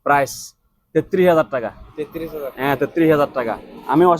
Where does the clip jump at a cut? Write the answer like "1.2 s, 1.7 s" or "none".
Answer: none